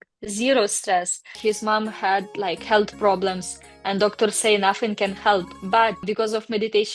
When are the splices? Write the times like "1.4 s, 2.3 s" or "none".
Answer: 1.3 s